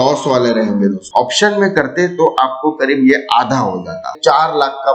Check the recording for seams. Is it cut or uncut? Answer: cut